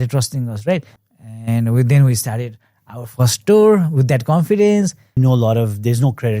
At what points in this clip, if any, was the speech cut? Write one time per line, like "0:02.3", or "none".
0:01.0
0:05.2